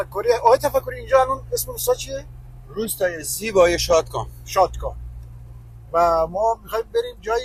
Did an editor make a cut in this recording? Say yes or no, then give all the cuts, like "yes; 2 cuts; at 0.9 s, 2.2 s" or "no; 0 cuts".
no; 0 cuts